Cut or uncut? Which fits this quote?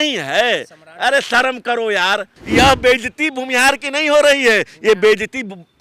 cut